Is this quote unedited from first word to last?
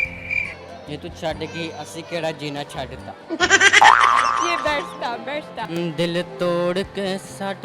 no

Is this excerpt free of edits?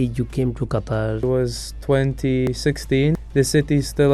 no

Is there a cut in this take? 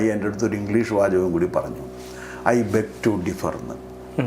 no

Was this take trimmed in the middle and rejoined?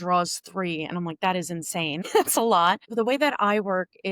yes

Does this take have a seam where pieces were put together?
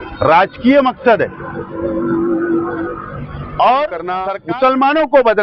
yes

